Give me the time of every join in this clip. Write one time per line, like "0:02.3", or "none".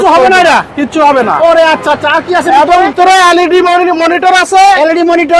none